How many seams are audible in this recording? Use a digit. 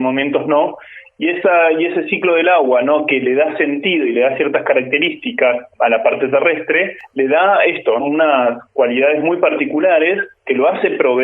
4